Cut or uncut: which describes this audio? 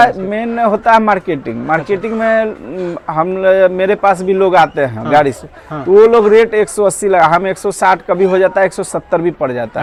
uncut